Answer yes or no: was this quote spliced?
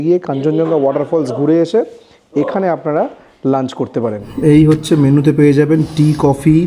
no